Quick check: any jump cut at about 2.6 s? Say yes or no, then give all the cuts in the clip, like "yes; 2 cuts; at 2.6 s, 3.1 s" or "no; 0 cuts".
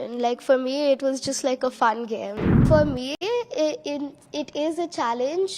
yes; 1 cut; at 2.6 s